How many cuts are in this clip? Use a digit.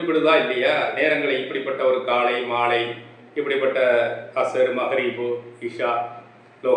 0